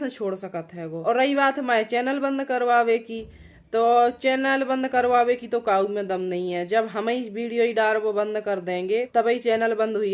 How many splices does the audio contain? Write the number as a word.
two